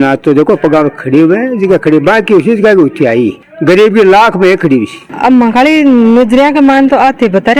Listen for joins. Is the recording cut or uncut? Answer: cut